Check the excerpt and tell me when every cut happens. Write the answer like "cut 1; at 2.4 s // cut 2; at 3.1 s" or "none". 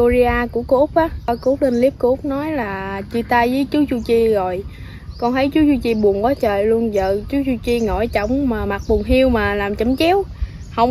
cut 1; at 1.3 s